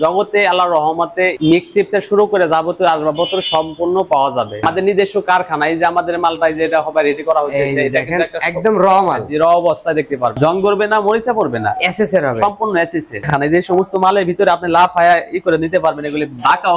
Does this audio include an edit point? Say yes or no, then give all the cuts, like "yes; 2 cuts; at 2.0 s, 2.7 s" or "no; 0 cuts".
yes; 3 cuts; at 4.6 s, 10.4 s, 13.3 s